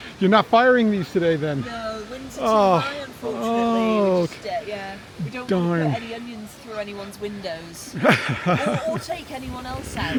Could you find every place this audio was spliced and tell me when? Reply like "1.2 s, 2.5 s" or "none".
none